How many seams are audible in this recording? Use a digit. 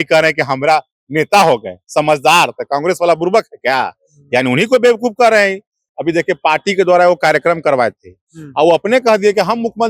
1